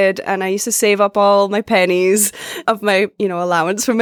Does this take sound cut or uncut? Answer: cut